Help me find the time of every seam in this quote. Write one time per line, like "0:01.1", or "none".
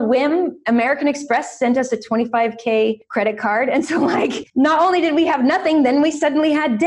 0:03.0
0:04.4